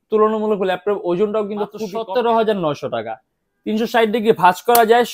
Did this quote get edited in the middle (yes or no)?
yes